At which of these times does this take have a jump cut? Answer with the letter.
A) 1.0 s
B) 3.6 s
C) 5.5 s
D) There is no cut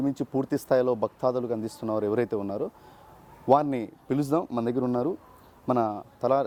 D